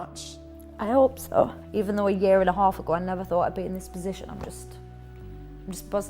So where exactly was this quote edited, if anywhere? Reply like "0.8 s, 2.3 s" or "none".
1.6 s